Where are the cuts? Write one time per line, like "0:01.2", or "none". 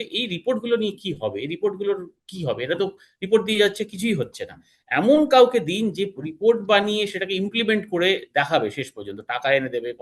none